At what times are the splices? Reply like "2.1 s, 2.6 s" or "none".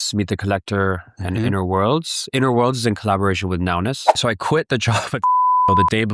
4.1 s